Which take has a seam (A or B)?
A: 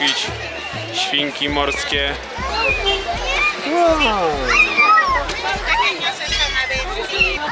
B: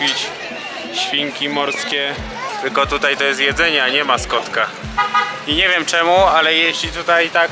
B